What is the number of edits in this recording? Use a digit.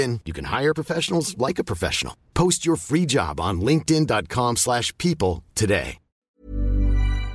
1